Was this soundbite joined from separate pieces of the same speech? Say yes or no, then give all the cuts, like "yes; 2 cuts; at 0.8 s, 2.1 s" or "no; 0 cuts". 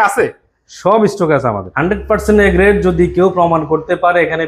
yes; 1 cut; at 1.6 s